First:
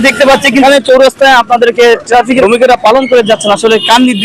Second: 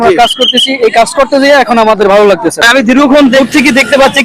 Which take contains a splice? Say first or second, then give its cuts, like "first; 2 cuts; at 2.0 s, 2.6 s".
second; 1 cut; at 2.6 s